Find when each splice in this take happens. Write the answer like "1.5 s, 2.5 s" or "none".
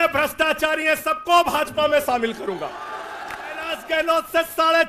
3.8 s